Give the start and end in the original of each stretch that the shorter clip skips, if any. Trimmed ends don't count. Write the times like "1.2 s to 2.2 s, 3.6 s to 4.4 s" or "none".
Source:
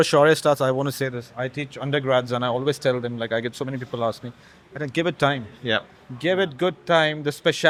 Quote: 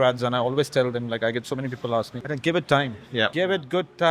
4.3 s to 4.7 s, 5.8 s to 6.2 s